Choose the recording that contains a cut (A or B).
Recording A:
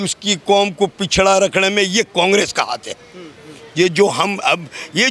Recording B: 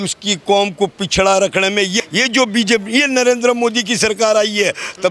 B